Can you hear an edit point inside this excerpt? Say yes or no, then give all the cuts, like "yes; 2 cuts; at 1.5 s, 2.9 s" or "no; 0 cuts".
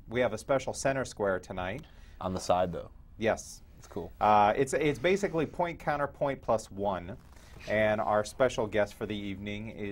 yes; 1 cut; at 7.0 s